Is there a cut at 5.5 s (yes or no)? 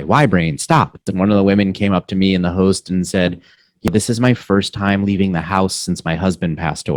no